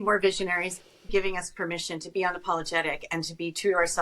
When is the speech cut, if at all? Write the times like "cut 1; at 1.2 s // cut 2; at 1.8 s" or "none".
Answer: cut 1; at 1.1 s